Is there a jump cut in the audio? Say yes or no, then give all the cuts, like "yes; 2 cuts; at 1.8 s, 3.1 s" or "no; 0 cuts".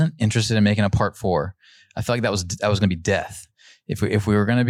no; 0 cuts